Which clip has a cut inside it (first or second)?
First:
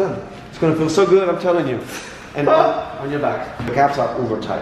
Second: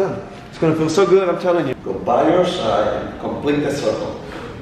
second